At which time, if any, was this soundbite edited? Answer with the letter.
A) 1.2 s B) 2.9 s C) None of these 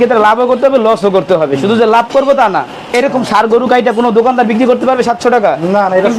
B